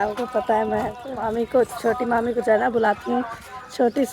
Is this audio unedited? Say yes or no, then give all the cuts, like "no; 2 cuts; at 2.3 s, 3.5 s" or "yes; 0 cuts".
no; 1 cut; at 1.6 s